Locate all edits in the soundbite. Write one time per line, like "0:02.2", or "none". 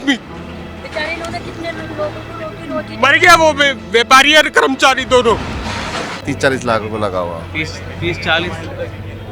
0:06.2